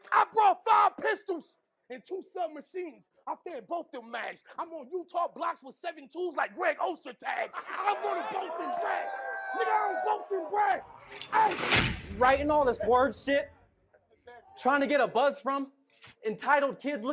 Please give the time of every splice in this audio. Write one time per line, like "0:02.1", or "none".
0:07.6